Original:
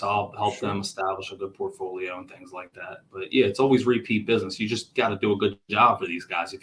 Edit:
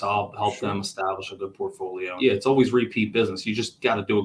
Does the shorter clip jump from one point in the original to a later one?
yes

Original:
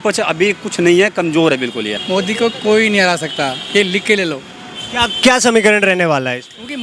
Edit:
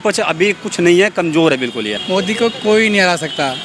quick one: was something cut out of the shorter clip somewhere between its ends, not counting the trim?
no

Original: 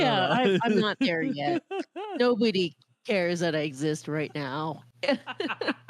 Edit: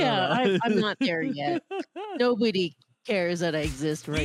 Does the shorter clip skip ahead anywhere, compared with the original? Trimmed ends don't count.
no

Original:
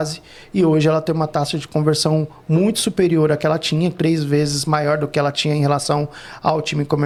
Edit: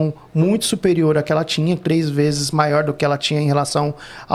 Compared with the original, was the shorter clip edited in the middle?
no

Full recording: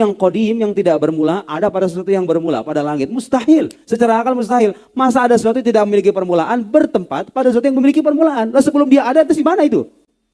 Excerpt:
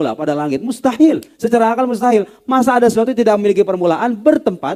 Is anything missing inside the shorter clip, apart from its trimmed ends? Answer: no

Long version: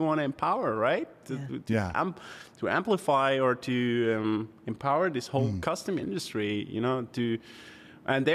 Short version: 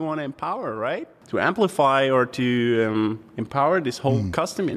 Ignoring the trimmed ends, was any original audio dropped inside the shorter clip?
yes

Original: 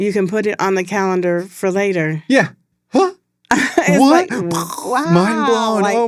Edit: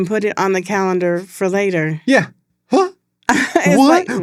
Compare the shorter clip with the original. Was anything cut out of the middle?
no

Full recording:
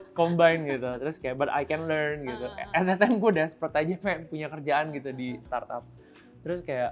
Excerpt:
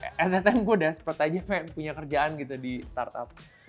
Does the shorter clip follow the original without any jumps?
yes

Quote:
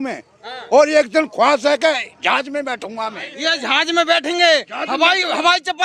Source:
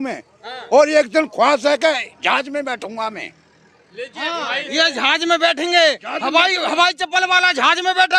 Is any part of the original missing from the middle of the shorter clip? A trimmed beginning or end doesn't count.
yes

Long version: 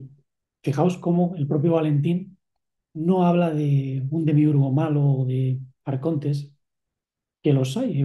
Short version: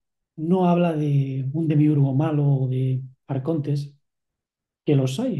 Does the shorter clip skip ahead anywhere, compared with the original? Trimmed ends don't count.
no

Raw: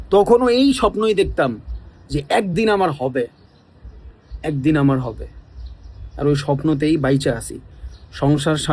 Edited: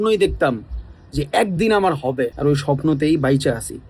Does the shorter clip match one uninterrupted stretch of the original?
no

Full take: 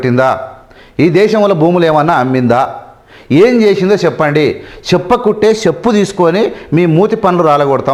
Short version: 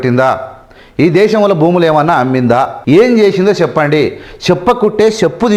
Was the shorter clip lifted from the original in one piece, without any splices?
no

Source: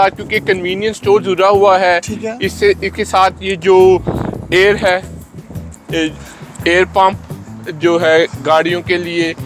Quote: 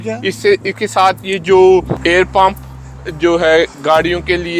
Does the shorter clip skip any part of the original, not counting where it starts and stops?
yes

